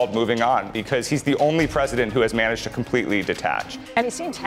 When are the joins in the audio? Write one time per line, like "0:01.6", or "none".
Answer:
none